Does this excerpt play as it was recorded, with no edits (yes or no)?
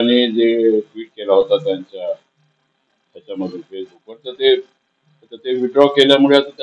yes